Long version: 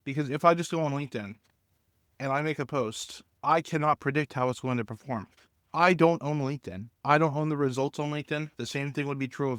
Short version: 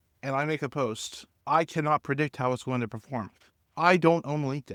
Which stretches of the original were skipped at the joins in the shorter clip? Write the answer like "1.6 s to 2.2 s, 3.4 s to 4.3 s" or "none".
none